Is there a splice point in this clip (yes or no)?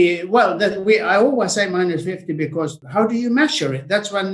yes